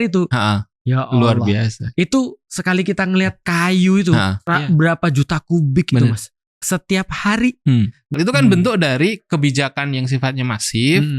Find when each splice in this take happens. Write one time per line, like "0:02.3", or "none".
0:03.4
0:04.4
0:06.4
0:08.0